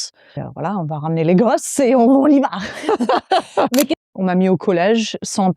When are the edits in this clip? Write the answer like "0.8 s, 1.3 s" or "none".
4.0 s